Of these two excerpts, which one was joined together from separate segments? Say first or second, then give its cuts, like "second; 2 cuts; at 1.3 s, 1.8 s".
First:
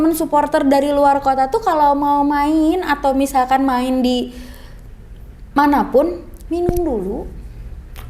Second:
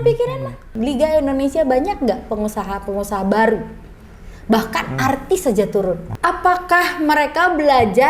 second; 2 cuts; at 0.7 s, 6.1 s